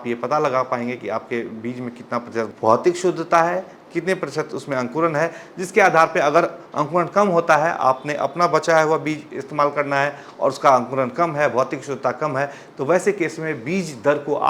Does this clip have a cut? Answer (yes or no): no